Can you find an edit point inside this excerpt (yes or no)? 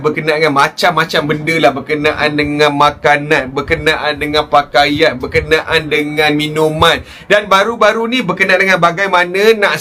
no